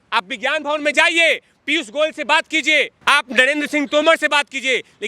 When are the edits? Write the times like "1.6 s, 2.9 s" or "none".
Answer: 2.9 s